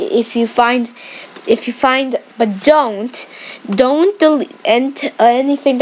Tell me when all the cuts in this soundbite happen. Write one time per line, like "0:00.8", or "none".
0:03.0